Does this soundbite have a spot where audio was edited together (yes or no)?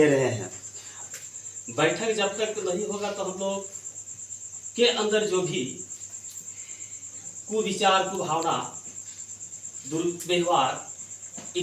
yes